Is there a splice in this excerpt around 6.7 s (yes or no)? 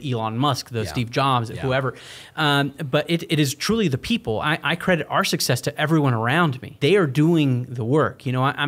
yes